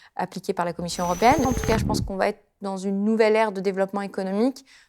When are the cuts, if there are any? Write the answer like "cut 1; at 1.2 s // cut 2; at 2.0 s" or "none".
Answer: cut 1; at 1.5 s